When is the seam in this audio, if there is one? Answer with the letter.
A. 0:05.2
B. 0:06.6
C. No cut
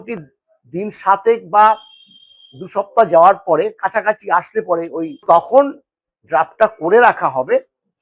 A